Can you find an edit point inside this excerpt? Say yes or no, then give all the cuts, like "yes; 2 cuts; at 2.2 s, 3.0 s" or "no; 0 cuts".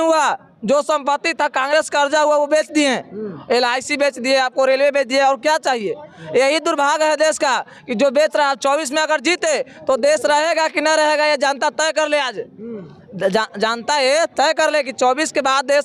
no; 0 cuts